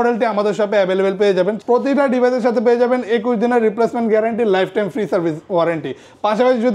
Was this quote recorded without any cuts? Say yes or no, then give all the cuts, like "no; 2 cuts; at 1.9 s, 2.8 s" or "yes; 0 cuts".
no; 1 cut; at 1.6 s